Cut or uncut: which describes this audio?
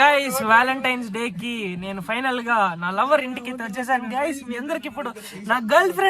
uncut